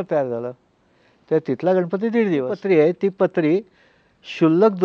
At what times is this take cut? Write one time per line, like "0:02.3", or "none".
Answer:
0:02.5